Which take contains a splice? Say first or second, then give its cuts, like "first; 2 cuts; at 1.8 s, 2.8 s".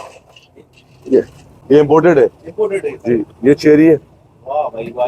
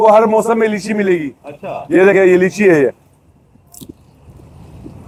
first; 1 cut; at 1.5 s